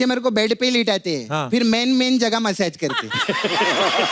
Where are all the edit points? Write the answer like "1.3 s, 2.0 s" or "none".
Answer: none